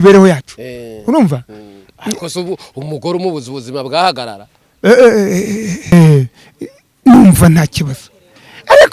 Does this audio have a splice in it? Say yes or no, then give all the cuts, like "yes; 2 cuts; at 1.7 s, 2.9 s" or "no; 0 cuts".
yes; 1 cut; at 5.9 s